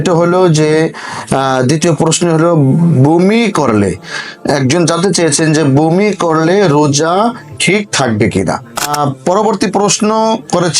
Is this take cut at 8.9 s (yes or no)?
yes